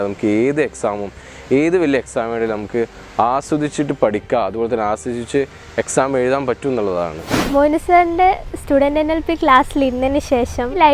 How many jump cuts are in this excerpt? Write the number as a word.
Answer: one